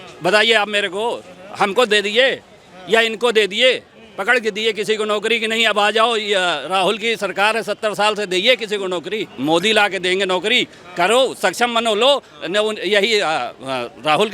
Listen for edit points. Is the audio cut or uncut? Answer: cut